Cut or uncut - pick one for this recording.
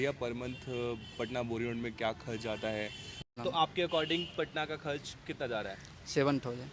cut